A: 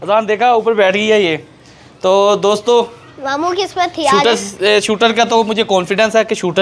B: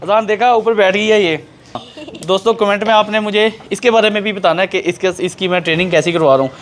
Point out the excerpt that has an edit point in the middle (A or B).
B